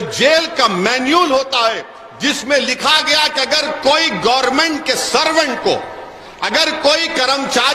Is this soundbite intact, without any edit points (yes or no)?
yes